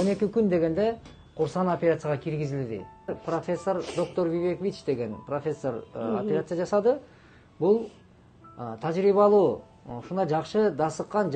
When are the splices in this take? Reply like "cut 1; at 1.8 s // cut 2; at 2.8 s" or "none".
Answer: cut 1; at 3.2 s